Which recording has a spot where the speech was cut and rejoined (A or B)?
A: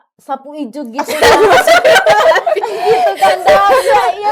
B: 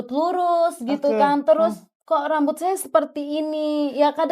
B